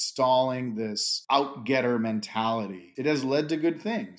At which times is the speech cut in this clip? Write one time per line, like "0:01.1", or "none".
0:01.1
0:02.8